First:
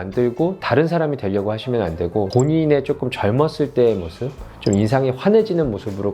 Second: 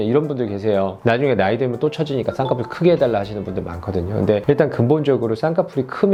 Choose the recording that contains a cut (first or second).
first